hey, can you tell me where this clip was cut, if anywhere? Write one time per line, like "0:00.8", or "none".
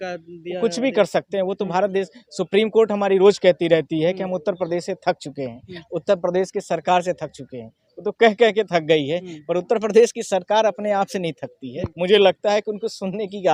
none